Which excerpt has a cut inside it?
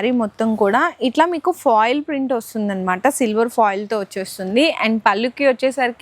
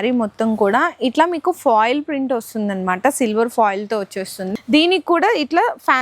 second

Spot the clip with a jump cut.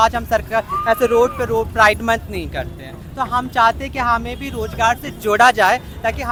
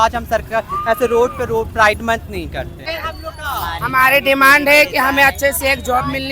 second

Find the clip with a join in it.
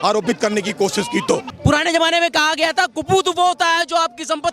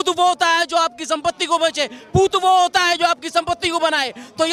first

